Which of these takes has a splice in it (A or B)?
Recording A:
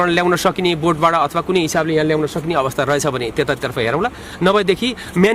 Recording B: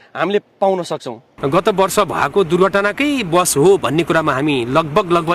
B